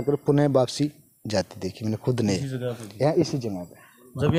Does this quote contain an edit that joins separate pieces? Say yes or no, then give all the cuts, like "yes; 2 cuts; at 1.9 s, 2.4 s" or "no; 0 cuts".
no; 0 cuts